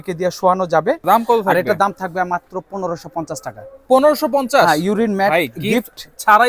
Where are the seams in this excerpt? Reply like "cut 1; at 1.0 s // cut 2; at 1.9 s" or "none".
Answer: cut 1; at 1.0 s

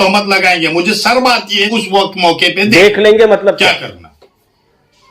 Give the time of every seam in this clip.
cut 1; at 1.7 s

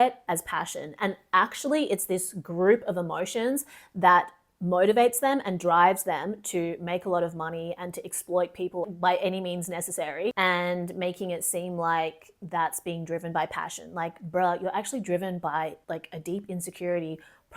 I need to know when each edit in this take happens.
cut 1; at 10.3 s

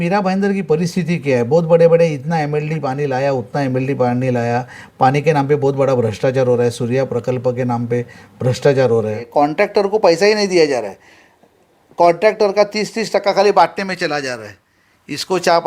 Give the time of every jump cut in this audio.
cut 1; at 9.2 s

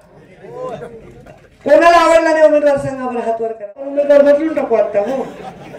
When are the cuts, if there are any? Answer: cut 1; at 3.9 s

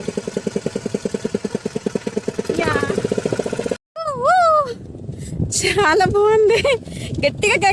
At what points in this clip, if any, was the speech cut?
cut 1; at 3.8 s

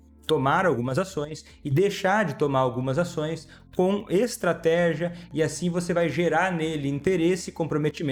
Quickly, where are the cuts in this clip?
none

